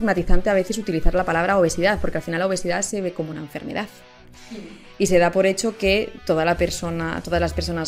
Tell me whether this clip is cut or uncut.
uncut